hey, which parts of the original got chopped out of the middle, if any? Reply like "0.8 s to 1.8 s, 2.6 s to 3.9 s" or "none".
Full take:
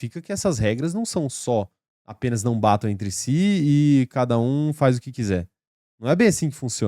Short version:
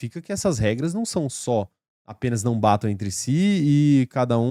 none